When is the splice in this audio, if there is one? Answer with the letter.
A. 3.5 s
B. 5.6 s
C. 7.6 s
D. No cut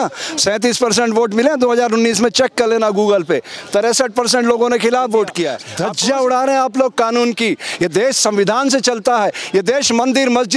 B